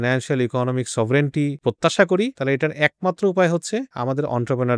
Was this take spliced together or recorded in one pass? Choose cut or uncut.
cut